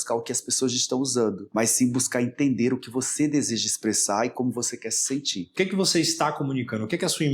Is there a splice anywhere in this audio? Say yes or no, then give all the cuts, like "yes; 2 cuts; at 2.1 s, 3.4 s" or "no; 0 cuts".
yes; 2 cuts; at 1.4 s, 5.5 s